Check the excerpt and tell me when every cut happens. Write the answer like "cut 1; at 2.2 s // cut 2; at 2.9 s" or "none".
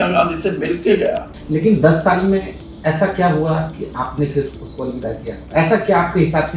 cut 1; at 1.3 s